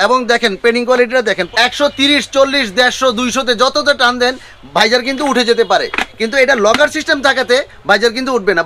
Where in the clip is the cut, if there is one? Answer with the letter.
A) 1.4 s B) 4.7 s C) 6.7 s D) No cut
A